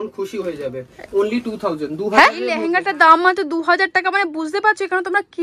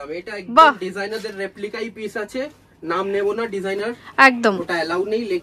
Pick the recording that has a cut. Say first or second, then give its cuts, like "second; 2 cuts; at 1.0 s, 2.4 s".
first; 1 cut; at 2.6 s